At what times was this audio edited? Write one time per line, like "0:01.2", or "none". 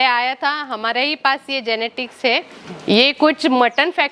0:02.5